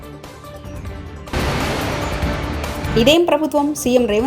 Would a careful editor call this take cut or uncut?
cut